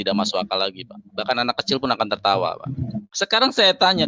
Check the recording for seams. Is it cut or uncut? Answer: cut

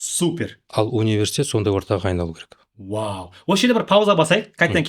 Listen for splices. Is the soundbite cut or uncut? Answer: uncut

